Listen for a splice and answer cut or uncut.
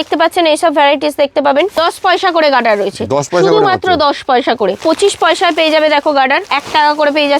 cut